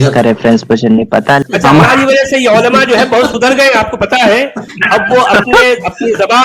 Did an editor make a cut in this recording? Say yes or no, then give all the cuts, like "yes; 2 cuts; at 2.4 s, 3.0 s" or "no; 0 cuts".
yes; 1 cut; at 1.5 s